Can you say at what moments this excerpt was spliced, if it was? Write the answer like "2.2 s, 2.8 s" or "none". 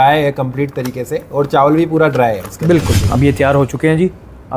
3.0 s